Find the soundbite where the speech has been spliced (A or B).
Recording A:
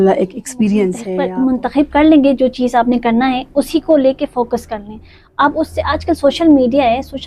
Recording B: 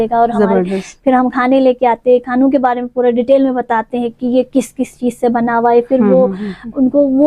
A